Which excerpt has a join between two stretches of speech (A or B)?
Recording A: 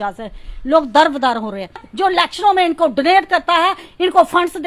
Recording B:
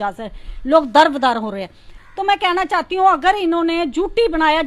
A